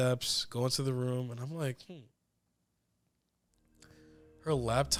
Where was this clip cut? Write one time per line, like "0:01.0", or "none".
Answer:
none